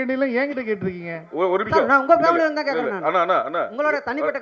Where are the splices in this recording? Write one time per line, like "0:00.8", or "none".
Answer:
none